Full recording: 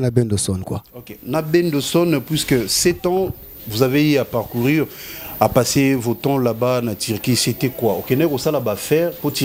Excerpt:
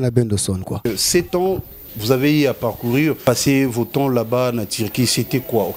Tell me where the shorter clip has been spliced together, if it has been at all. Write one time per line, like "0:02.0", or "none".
0:00.9
0:03.2